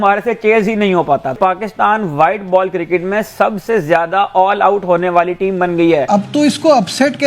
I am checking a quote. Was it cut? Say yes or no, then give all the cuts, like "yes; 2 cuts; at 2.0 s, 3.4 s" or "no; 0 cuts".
yes; 1 cut; at 6.1 s